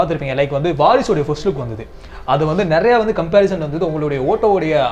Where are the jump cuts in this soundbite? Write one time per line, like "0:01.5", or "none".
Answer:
none